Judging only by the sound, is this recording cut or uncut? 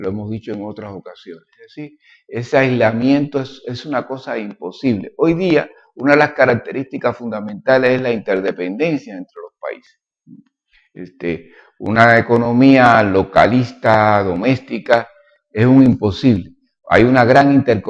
cut